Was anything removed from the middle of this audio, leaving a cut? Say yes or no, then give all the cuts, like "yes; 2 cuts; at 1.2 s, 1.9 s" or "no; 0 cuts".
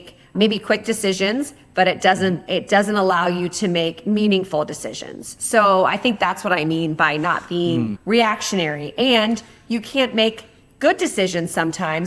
no; 0 cuts